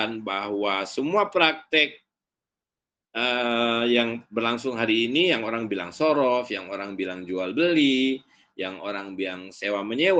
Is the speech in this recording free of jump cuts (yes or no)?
yes